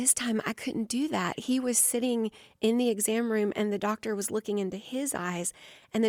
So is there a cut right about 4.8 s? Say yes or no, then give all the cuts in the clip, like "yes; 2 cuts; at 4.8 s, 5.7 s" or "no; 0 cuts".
no; 0 cuts